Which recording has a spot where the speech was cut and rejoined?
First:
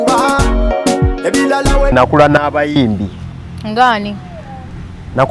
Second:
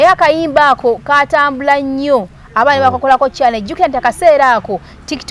first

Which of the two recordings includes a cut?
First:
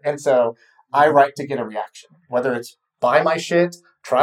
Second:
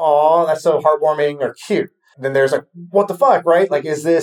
second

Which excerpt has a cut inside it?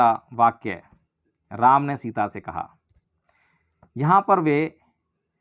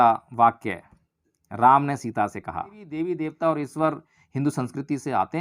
second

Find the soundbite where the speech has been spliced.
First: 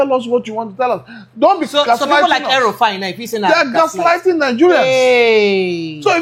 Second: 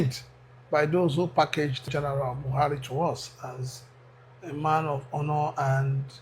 second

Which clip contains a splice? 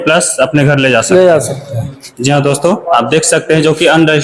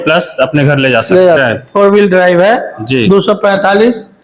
second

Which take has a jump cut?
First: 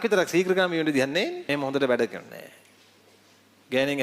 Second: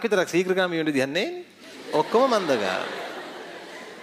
first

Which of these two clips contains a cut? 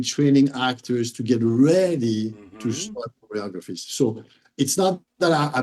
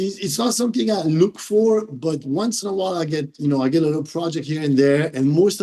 first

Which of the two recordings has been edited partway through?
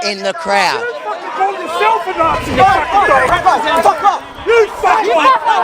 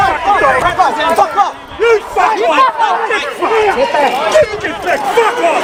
first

